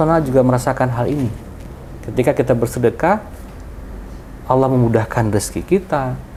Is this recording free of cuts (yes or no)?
yes